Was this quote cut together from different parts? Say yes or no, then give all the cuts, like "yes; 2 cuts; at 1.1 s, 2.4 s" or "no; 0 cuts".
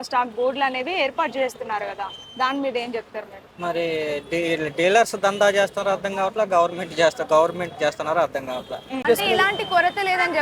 yes; 1 cut; at 9.0 s